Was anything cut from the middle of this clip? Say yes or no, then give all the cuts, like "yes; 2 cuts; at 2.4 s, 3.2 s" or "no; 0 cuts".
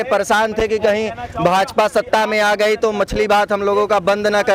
no; 0 cuts